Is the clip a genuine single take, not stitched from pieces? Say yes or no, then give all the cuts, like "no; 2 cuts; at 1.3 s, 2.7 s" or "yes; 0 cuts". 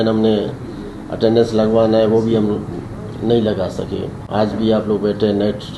yes; 0 cuts